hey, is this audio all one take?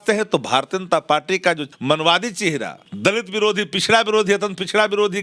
no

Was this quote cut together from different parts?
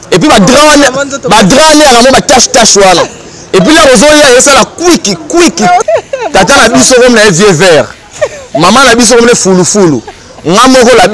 yes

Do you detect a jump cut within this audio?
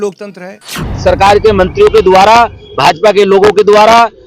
yes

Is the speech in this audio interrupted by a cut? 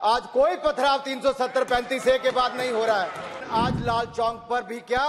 yes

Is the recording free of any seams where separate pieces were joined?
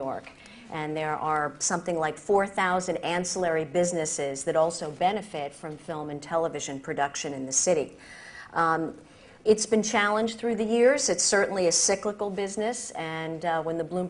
no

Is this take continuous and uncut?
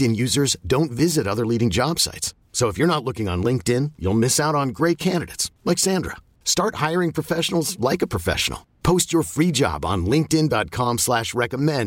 yes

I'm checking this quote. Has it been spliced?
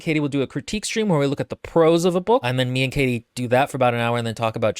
yes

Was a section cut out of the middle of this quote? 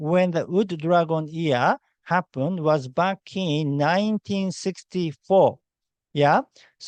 no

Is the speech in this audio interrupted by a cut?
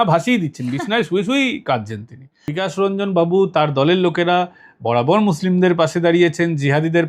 yes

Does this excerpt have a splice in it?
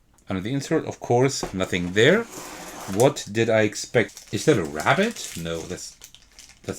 yes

